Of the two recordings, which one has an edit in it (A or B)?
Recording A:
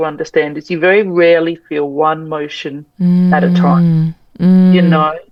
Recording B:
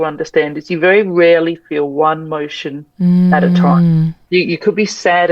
B